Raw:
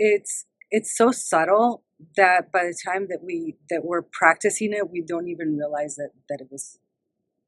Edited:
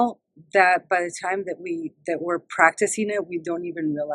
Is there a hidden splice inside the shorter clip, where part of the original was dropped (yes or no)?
no